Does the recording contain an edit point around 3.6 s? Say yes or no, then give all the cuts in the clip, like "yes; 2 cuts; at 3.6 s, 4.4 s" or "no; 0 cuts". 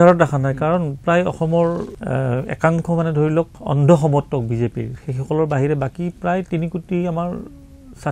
yes; 2 cuts; at 1.9 s, 3.6 s